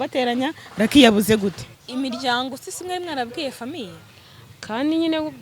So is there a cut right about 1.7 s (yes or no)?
yes